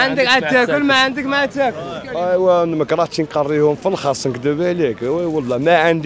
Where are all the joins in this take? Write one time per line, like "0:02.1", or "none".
0:02.0